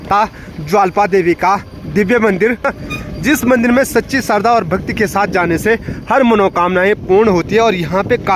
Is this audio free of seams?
yes; 0 cuts

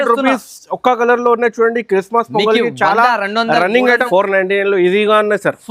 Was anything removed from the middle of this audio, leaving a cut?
yes; 1 cut; at 4.0 s

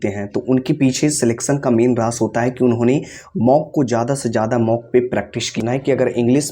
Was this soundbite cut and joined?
yes; 1 cut; at 5.6 s

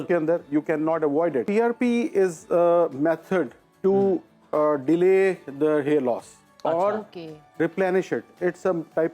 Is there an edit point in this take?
yes; 1 cut; at 1.5 s

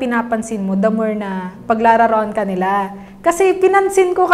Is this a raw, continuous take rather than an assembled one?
yes; 0 cuts

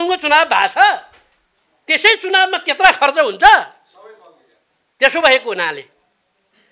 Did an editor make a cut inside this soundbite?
no; 0 cuts

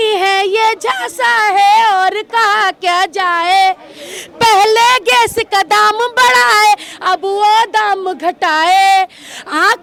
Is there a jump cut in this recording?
no; 0 cuts

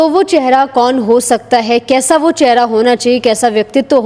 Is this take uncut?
yes; 0 cuts

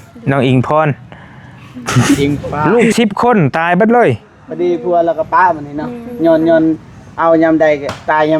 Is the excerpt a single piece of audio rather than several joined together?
no; 1 cut; at 2.6 s

